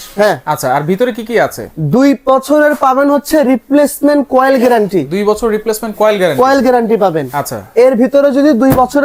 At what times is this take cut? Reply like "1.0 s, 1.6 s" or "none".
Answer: none

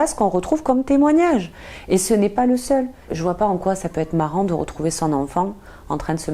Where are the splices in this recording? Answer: 3.0 s

